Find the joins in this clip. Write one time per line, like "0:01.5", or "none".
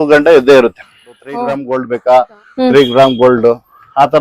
0:01.6